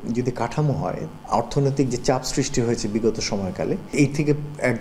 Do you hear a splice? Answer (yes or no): yes